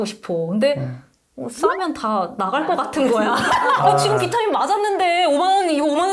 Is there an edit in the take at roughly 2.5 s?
no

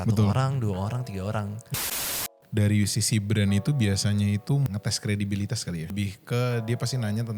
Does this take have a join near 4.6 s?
yes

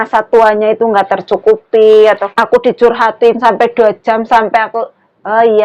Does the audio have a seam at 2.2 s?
yes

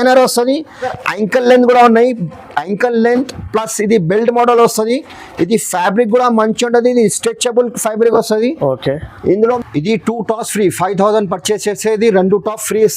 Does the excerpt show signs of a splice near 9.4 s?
yes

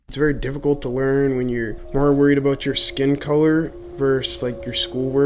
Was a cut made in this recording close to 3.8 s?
yes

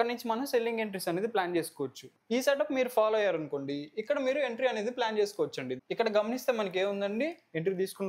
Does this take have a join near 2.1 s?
yes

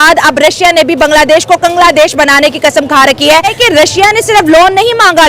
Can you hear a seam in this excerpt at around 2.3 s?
no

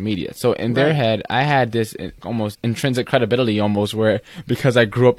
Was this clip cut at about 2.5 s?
yes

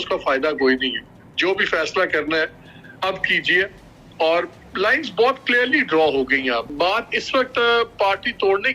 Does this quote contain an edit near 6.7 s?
yes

